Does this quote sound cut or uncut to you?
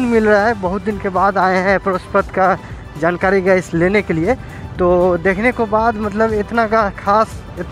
uncut